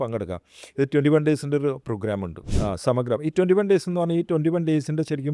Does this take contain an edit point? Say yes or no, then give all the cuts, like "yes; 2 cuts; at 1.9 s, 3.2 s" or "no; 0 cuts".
yes; 1 cut; at 2.4 s